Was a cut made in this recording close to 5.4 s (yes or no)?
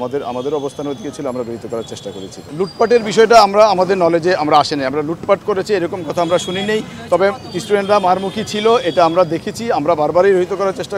no